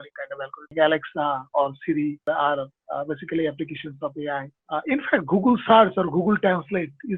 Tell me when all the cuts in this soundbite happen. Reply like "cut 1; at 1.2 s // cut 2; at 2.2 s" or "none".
cut 1; at 0.7 s // cut 2; at 2.3 s // cut 3; at 4.5 s